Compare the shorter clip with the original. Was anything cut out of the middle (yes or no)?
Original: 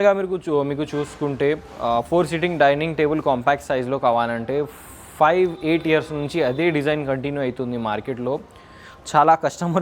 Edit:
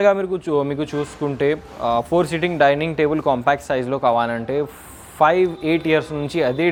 no